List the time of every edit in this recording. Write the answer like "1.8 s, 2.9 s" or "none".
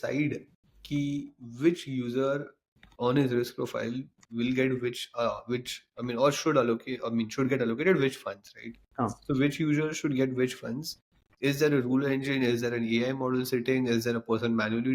none